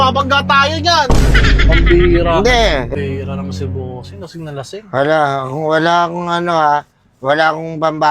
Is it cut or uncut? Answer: cut